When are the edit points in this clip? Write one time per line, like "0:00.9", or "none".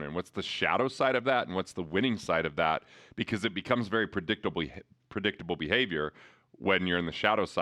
none